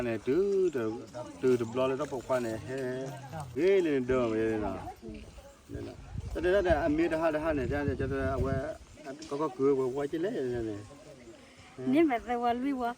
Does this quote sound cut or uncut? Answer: cut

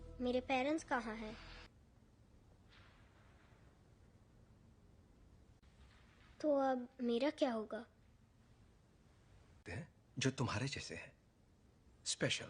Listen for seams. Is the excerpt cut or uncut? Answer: cut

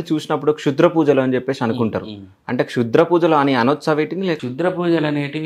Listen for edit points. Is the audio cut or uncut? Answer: cut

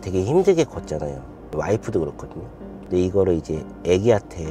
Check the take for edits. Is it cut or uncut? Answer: cut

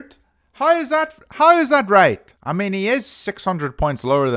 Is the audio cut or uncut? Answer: cut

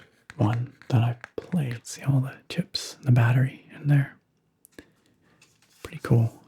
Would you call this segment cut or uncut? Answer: cut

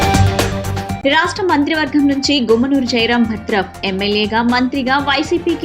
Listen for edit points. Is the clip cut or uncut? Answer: cut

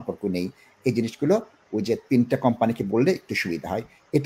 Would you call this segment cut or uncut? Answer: uncut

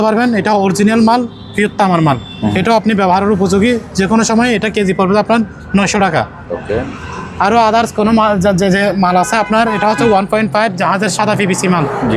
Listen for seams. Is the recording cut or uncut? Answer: uncut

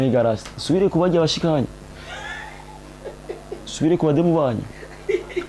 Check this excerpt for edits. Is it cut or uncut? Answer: uncut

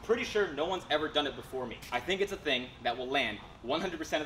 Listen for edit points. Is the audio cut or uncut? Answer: cut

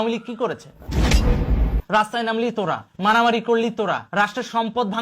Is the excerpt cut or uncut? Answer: cut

